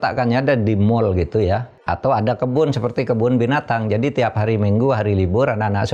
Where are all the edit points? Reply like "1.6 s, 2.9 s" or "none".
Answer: 1.7 s

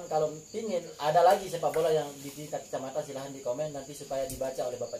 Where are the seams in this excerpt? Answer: 1.0 s

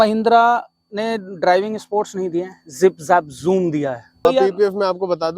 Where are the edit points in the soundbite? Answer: 4.3 s

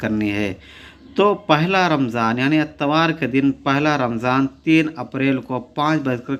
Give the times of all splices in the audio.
none

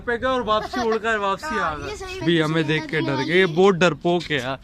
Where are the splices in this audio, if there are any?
2.2 s

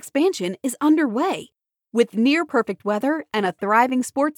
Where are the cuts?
none

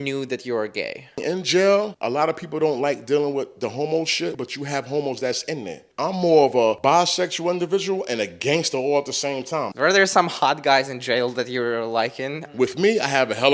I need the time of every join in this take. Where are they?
1.2 s, 2.0 s, 4.4 s, 5.8 s, 6.8 s, 9.7 s, 12.4 s

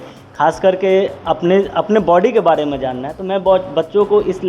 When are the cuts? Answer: none

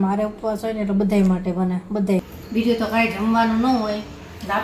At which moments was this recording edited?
2.3 s

